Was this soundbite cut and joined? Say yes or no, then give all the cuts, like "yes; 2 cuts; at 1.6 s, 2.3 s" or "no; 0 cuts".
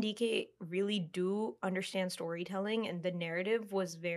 no; 0 cuts